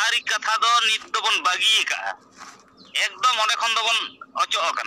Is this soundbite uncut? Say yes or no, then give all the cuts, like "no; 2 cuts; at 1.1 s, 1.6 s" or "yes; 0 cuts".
yes; 0 cuts